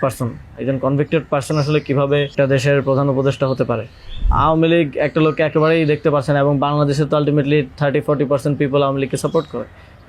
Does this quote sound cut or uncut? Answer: cut